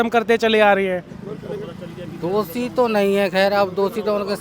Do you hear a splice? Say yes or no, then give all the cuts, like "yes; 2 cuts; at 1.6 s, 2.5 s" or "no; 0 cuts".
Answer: yes; 1 cut; at 1.1 s